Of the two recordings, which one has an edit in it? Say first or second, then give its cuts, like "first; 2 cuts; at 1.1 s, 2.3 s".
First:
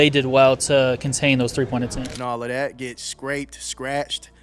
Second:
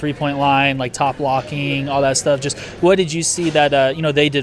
first; 1 cut; at 2.1 s